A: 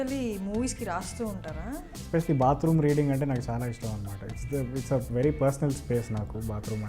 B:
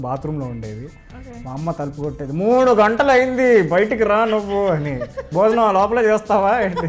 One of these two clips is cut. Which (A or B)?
A